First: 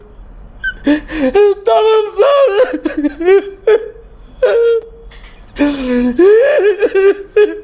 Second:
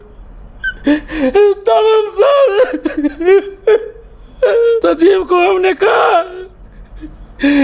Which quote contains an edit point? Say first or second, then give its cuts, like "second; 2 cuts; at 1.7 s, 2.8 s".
second; 1 cut; at 4.8 s